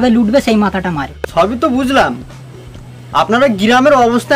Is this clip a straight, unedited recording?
no; 1 cut; at 1.0 s

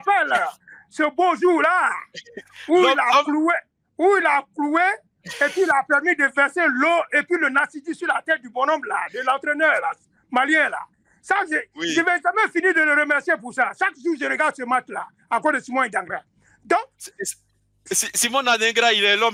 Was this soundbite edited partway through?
no; 0 cuts

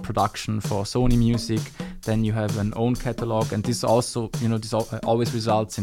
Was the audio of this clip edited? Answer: no; 0 cuts

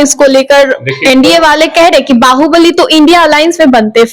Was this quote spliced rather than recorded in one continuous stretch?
no; 0 cuts

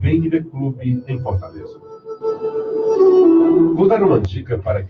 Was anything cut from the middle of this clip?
yes; 1 cut; at 3.7 s

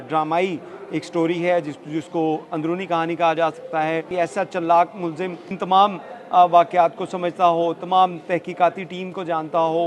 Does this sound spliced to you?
yes; 1 cut; at 4.1 s

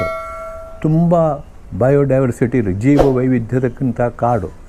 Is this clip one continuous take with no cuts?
yes; 0 cuts

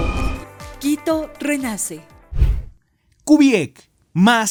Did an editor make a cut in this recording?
no; 0 cuts

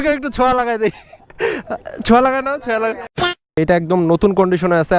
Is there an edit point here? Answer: yes; 1 cut; at 3.6 s

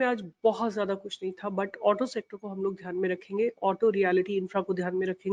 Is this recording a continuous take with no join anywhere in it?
yes; 0 cuts

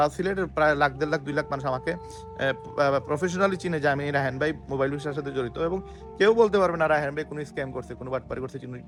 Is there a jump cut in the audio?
no; 0 cuts

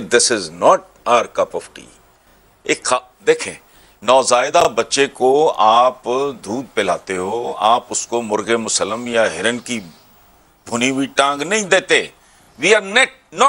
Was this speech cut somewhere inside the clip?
no; 0 cuts

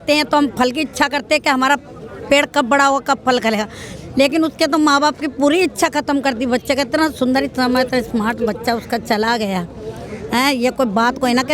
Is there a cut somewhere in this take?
no; 0 cuts

